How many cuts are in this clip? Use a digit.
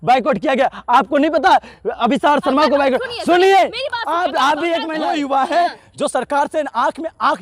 1